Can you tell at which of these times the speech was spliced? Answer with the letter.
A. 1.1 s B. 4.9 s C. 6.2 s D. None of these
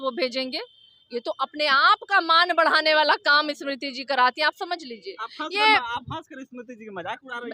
D